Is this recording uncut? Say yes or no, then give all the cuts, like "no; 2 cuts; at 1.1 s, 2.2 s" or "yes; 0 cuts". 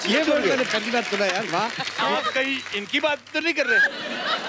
no; 1 cut; at 1.8 s